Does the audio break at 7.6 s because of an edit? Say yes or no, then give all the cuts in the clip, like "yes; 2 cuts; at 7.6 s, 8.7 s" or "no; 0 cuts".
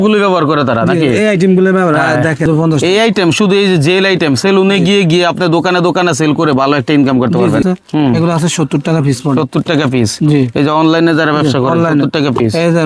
yes; 2 cuts; at 2.5 s, 7.6 s